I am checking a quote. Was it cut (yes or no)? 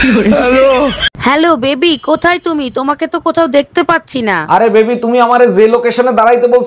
yes